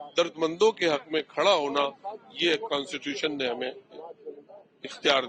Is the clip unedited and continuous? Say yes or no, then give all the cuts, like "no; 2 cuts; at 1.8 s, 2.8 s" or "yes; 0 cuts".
yes; 0 cuts